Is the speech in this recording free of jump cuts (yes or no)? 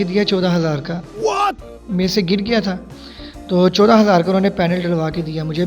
yes